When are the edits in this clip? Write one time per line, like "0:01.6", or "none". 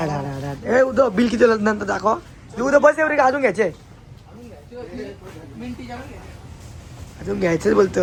none